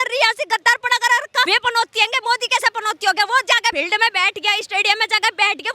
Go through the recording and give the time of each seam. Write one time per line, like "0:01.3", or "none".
0:01.5
0:03.7